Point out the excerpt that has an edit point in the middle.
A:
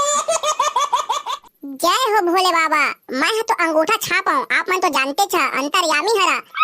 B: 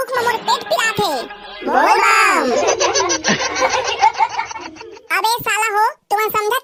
A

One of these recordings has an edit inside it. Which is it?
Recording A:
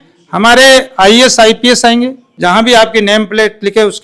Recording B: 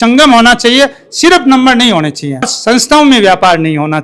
A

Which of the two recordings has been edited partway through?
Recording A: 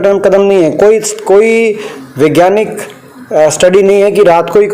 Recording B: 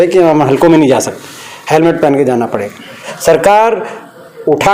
B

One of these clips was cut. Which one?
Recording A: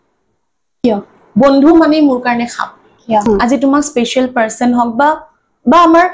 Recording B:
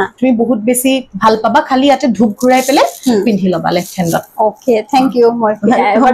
A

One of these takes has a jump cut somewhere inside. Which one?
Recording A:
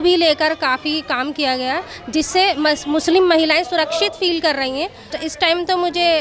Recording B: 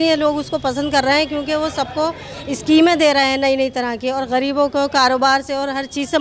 A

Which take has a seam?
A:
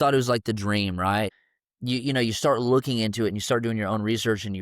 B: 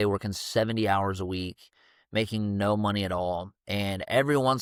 A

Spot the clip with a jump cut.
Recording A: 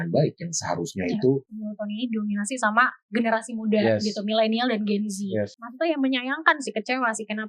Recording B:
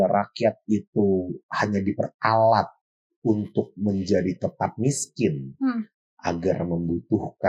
A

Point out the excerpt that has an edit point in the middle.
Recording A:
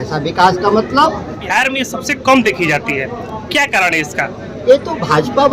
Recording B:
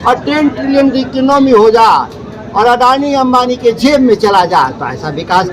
A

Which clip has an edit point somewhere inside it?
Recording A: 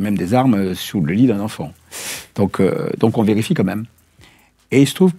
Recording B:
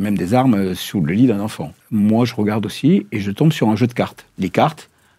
B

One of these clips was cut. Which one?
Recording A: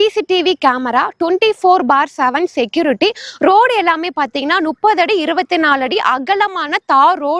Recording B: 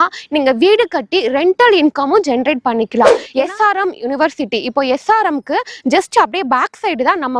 B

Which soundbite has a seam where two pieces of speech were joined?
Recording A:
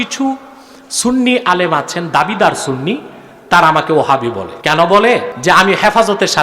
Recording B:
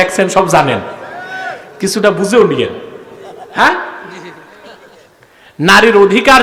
A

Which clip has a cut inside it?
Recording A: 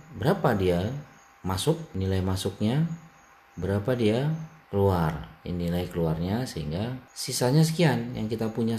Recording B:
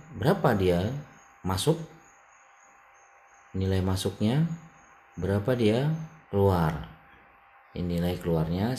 A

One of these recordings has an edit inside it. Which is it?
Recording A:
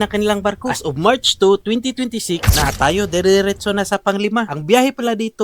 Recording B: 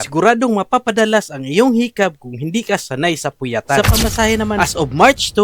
A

